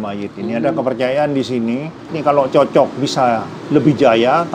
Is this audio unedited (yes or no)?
no